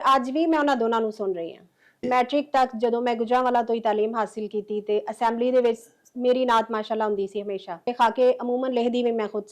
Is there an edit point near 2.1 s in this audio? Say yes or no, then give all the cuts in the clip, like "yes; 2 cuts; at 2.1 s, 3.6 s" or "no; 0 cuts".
yes; 2 cuts; at 2.1 s, 7.9 s